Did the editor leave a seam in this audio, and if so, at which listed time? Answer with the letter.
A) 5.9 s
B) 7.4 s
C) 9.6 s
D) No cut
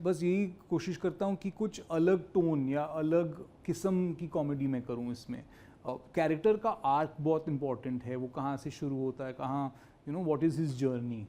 A